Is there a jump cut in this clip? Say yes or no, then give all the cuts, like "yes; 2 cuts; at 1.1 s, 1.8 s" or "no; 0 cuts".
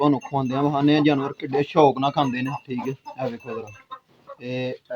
no; 0 cuts